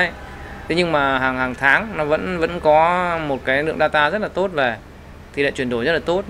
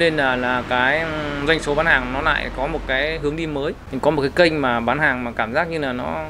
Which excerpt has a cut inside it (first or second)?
second